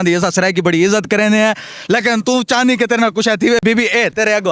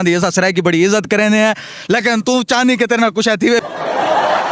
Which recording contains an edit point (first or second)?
second